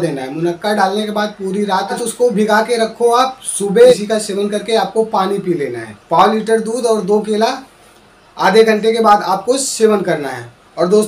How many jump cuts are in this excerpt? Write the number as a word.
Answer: three